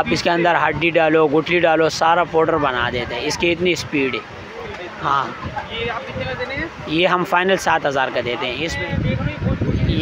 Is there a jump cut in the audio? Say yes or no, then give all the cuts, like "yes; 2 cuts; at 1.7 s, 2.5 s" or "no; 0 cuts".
yes; 1 cut; at 8.7 s